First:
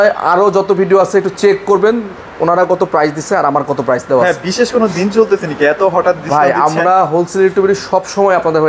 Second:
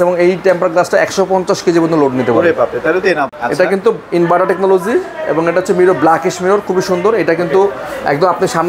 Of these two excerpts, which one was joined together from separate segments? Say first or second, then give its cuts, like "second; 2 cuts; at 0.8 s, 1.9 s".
second; 1 cut; at 3.3 s